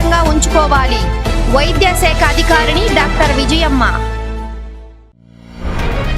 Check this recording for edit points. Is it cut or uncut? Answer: cut